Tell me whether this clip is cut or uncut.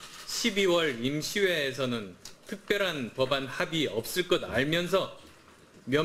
uncut